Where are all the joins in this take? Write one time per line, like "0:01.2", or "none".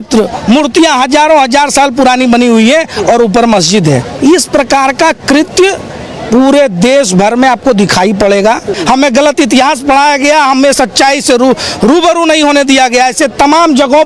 0:04.1
0:08.7